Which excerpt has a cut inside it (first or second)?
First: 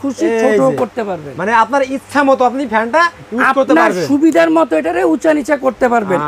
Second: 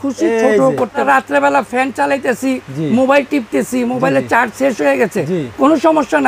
second